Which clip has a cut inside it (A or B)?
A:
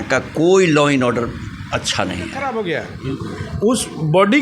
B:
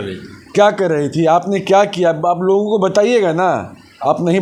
A